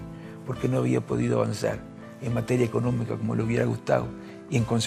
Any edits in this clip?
no; 0 cuts

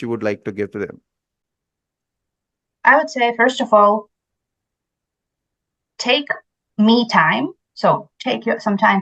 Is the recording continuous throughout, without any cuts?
yes; 0 cuts

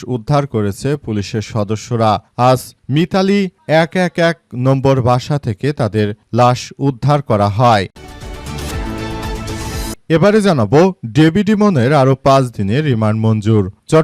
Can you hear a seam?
yes; 2 cuts; at 7.9 s, 10.0 s

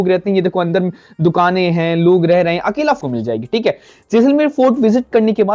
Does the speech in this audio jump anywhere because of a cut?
yes; 1 cut; at 3.0 s

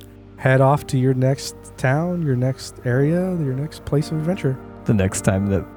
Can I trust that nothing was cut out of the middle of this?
yes; 0 cuts

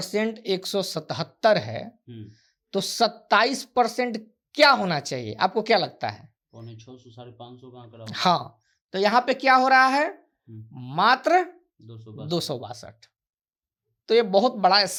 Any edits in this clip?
no; 0 cuts

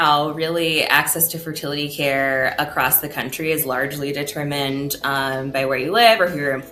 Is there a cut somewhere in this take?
no; 0 cuts

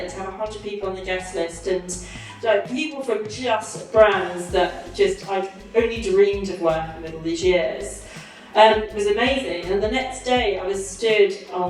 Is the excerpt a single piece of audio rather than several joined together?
yes; 0 cuts

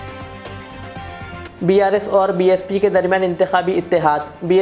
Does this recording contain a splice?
yes; 1 cut; at 1.4 s

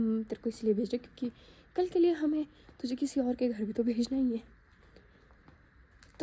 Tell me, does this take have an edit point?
no; 0 cuts

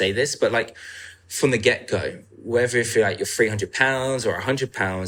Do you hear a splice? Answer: no; 0 cuts

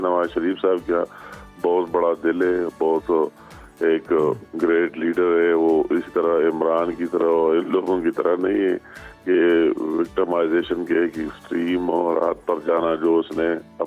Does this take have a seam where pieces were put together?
no; 0 cuts

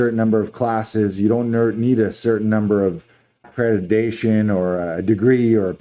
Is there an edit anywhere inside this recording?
yes; 1 cut; at 3.5 s

